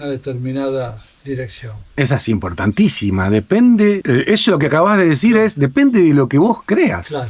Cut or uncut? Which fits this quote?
uncut